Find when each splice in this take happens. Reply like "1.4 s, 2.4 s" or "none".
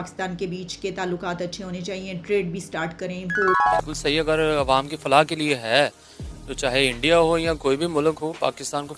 3.8 s